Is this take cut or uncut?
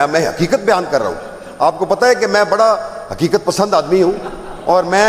uncut